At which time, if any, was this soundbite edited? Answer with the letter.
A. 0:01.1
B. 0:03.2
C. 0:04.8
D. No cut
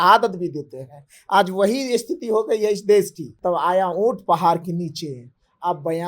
B